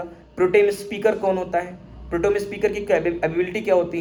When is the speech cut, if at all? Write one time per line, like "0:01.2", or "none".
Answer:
none